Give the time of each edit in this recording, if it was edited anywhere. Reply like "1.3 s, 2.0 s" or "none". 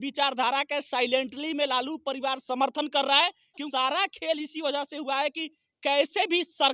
3.7 s